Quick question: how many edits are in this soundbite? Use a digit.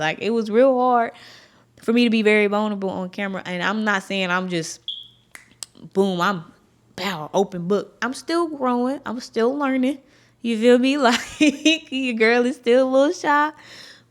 0